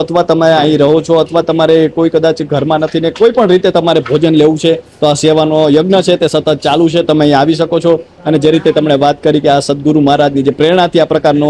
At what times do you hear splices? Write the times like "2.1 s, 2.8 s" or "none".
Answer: none